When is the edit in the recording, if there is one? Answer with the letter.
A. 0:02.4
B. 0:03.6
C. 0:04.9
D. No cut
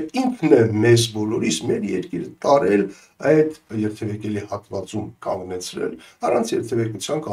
B